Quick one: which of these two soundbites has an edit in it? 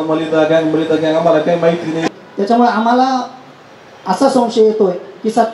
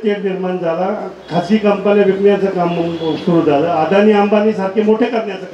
first; 1 cut; at 2.1 s

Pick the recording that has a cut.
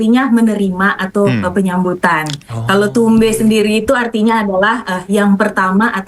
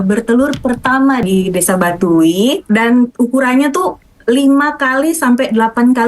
second; 2 cuts; at 1.2 s, 2.6 s

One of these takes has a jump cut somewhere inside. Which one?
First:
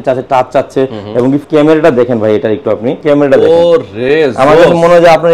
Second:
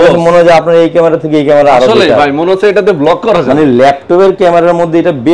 first; 2 cuts; at 1.4 s, 3.0 s

